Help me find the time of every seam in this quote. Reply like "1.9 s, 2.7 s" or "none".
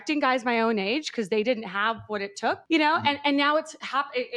none